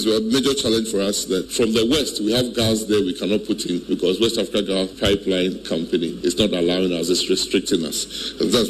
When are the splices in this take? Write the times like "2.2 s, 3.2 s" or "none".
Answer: 1.5 s, 3.8 s, 4.9 s, 6.1 s